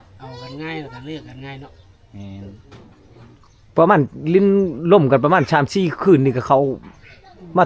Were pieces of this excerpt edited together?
no; 0 cuts

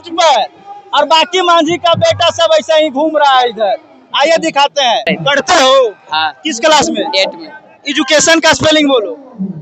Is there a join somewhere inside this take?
yes; 1 cut; at 5.1 s

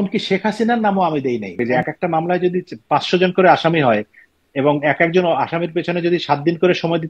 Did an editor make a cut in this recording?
yes; 1 cut; at 1.6 s

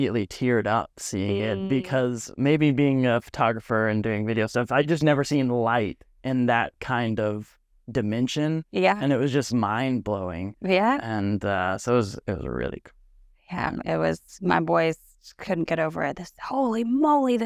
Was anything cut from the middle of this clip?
no; 0 cuts

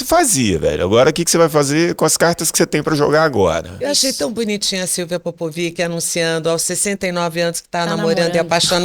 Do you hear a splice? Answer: no; 0 cuts

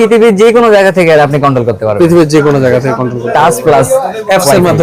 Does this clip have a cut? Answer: no; 0 cuts

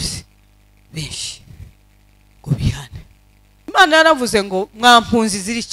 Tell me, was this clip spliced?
yes; 1 cut; at 3.7 s

